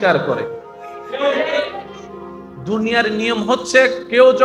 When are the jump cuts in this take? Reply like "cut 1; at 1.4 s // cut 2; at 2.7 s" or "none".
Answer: none